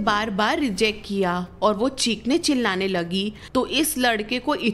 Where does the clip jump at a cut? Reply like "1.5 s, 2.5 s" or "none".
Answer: 3.4 s